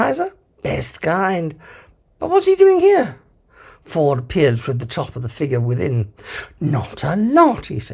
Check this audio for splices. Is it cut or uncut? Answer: cut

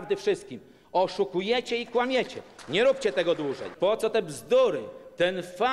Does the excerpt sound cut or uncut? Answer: cut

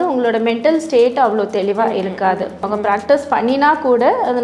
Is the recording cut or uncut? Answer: cut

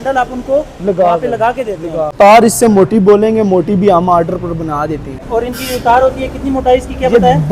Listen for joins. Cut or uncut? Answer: cut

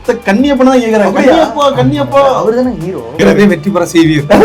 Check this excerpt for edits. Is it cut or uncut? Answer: cut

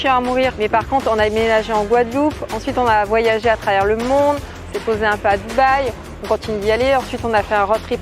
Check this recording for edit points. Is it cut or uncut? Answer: uncut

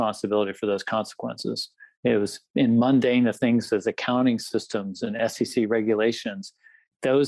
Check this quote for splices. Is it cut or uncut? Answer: uncut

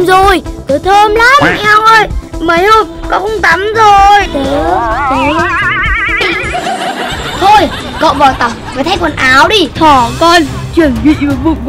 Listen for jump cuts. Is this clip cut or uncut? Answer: cut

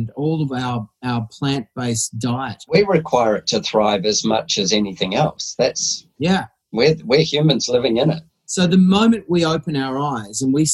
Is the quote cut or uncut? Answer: cut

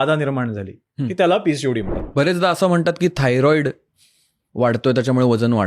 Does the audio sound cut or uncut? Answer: cut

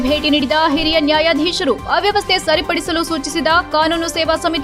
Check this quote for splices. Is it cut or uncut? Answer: uncut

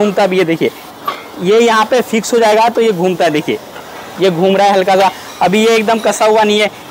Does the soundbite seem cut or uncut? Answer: uncut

